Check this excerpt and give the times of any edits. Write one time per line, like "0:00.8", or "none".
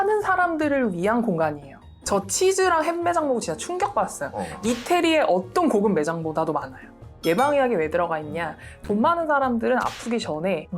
0:01.9
0:07.0

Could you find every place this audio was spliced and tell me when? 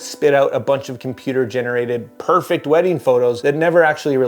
0:03.4

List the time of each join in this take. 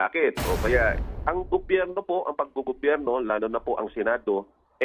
0:01.0

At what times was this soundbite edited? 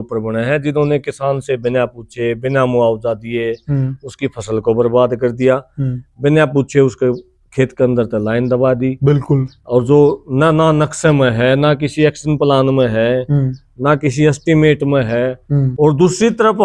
0:15.7

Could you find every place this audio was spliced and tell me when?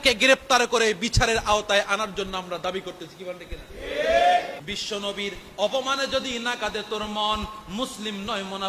0:04.6

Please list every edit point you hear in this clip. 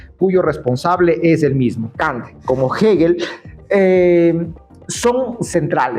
0:01.9

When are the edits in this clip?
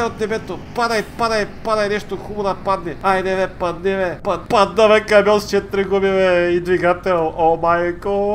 0:02.9
0:04.3

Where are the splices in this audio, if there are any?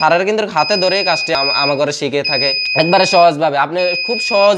0:01.3
0:02.6

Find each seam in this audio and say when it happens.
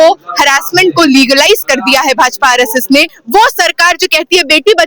0:03.2

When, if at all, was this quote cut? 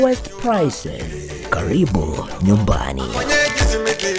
0:03.1

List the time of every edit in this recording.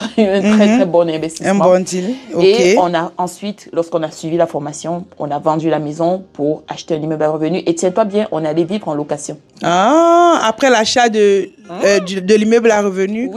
none

